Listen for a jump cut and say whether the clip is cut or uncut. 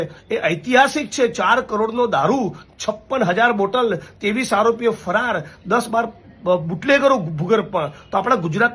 uncut